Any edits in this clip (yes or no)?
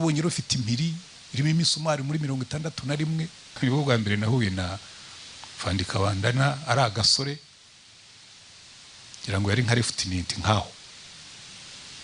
yes